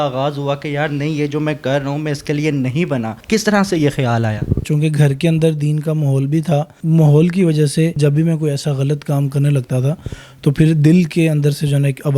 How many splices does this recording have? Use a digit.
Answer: 4